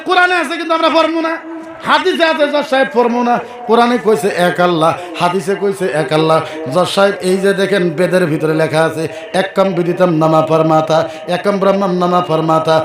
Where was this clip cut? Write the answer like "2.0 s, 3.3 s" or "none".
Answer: none